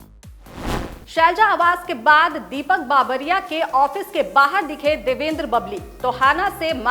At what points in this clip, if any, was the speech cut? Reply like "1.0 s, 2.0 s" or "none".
none